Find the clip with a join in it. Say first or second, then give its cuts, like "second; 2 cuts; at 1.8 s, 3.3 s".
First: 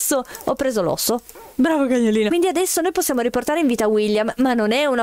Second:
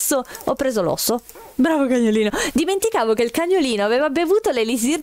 first; 1 cut; at 2.3 s